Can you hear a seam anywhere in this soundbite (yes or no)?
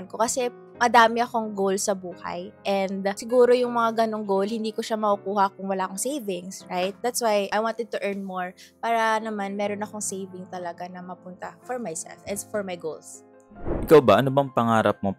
no